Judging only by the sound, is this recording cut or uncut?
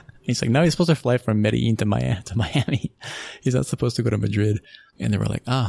uncut